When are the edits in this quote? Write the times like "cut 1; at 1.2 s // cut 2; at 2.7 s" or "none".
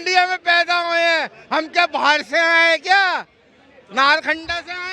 none